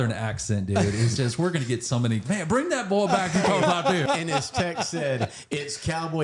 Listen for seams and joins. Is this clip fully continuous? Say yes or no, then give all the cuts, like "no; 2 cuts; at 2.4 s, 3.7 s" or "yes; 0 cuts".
no; 2 cuts; at 2.2 s, 4.0 s